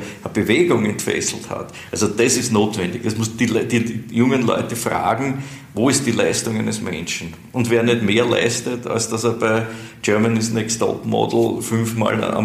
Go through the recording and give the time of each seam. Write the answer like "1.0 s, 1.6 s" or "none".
none